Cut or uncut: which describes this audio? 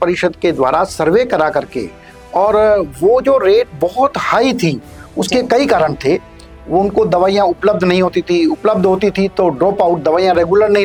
uncut